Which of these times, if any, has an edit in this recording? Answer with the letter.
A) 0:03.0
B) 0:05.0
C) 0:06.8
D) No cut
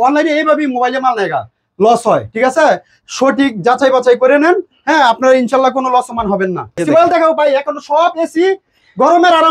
C